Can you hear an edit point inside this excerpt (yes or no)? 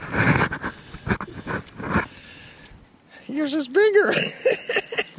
no